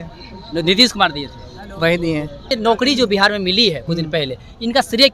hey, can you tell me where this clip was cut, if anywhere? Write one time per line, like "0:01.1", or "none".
0:02.5